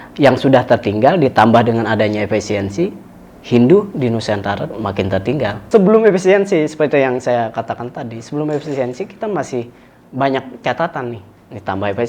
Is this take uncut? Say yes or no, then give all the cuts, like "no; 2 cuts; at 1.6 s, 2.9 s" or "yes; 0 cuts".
no; 1 cut; at 5.6 s